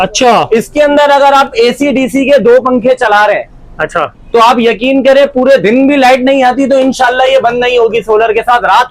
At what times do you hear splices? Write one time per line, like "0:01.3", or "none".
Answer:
none